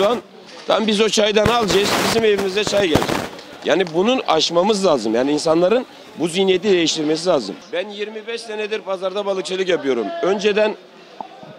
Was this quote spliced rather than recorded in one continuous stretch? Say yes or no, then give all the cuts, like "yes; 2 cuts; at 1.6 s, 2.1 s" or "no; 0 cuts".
yes; 1 cut; at 7.6 s